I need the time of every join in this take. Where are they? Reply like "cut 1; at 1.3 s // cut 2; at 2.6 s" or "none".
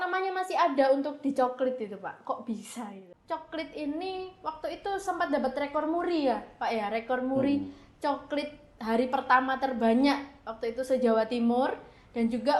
cut 1; at 3.1 s